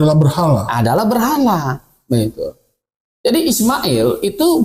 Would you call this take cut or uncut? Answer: uncut